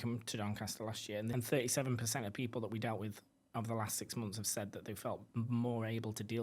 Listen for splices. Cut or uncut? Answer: cut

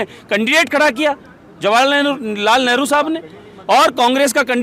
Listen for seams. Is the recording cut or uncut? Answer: uncut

